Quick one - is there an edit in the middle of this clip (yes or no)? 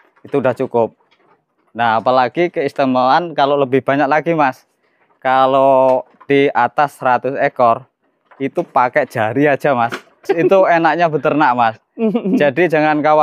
yes